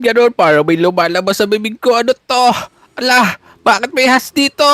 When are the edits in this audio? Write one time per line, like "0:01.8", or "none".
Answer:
none